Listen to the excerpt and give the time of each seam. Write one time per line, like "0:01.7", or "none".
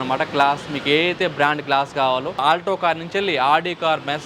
0:02.4